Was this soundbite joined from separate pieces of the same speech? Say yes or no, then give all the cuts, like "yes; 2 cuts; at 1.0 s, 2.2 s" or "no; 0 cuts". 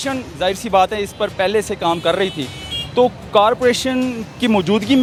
no; 0 cuts